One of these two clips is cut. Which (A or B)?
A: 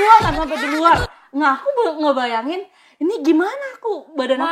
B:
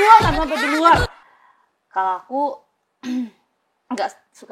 B